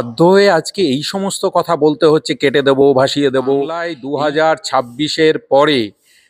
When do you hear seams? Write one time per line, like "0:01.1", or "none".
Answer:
0:03.9